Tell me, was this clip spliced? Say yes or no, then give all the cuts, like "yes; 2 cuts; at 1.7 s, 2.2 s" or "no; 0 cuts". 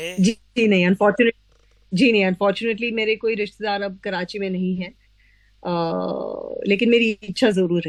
no; 0 cuts